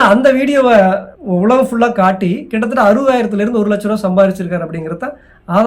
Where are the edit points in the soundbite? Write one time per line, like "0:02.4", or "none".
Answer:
0:01.1